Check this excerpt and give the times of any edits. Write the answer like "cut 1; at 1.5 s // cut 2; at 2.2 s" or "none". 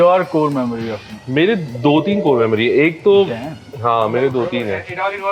cut 1; at 1.1 s